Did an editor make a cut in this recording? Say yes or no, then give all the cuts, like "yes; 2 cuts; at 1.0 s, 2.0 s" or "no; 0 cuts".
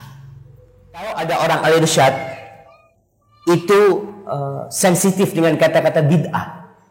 yes; 1 cut; at 1.1 s